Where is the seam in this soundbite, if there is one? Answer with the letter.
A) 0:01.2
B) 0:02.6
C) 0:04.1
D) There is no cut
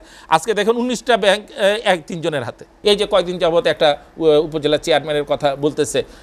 B